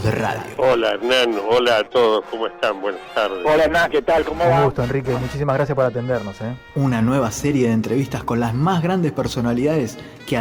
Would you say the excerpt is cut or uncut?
uncut